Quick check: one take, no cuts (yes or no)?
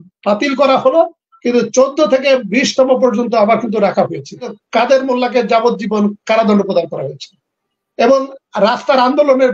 no